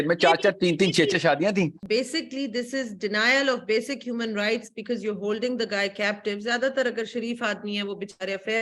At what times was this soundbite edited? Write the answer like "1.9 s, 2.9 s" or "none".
1.8 s

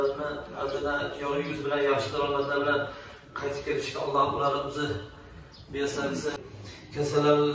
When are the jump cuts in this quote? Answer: 6.4 s

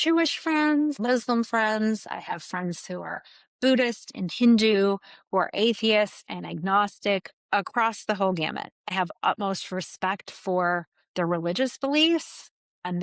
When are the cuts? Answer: 1.0 s

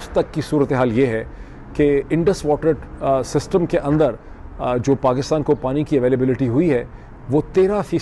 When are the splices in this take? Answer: none

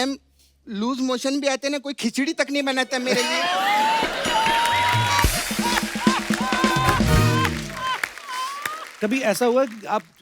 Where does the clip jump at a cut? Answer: 8.8 s

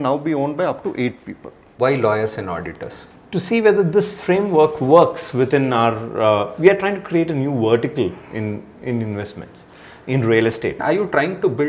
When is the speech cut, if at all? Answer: 1.7 s, 10.8 s

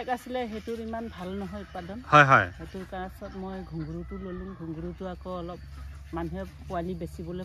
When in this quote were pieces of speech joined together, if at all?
none

